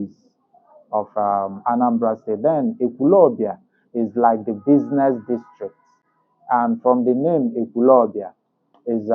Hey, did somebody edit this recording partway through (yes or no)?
no